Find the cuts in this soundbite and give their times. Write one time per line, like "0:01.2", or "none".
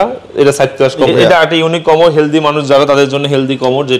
0:01.1